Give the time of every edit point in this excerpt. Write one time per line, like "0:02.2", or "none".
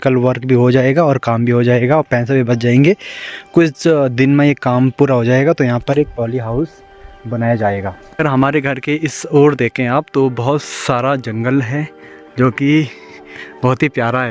none